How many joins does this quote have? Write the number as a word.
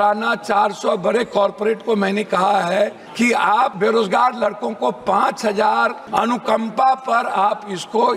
two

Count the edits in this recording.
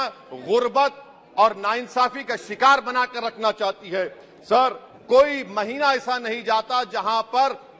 one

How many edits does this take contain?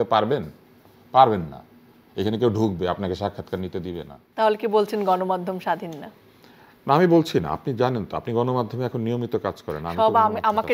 one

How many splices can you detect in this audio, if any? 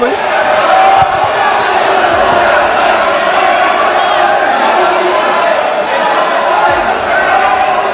zero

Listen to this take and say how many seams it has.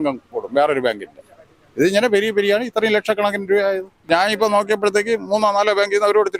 one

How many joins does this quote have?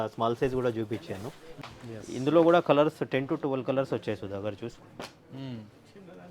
one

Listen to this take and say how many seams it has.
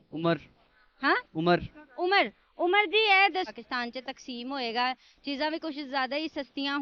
one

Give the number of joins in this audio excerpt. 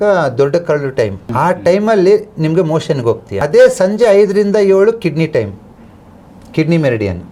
two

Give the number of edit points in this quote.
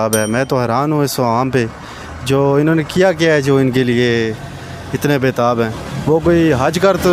zero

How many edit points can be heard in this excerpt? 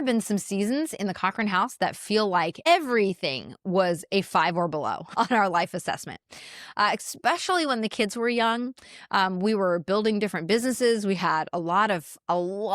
two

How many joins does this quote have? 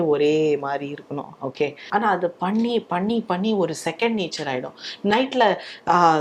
one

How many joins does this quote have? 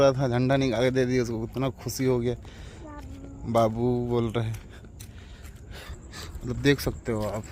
one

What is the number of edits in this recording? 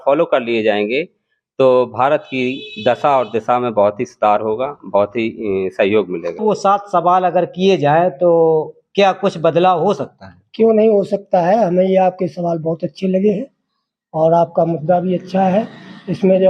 one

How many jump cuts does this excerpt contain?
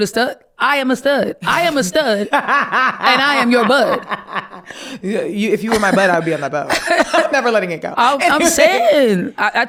zero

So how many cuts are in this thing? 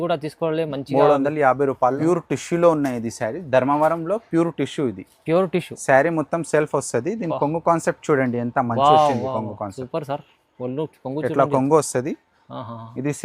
one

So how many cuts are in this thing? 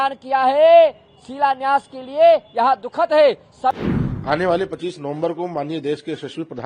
one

